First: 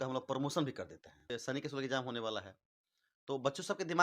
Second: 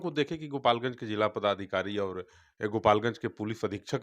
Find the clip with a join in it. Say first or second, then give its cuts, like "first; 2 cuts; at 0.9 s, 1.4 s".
first; 1 cut; at 1.3 s